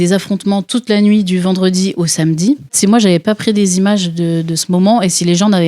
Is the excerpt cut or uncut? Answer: cut